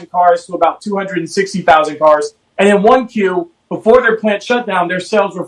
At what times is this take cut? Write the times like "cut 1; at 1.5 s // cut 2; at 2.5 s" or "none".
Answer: cut 1; at 2.4 s